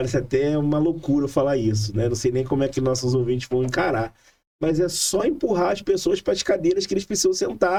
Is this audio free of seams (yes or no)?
yes